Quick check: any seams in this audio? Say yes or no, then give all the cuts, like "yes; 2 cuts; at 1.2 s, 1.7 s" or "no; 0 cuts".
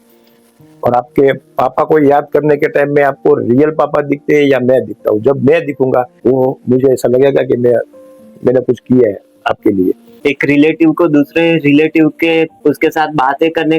yes; 3 cuts; at 6.1 s, 10.1 s, 12.5 s